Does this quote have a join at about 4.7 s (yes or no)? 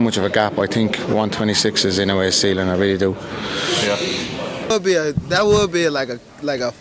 yes